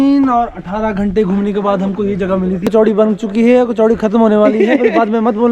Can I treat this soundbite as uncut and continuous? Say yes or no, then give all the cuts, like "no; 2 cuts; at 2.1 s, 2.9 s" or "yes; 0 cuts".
no; 1 cut; at 2.6 s